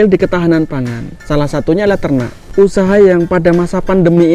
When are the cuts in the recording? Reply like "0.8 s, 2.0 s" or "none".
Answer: 2.4 s